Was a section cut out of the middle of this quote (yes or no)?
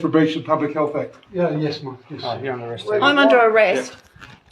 yes